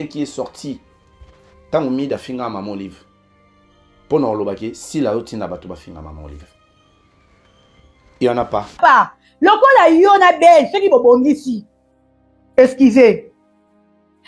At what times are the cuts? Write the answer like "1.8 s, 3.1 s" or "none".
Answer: 8.7 s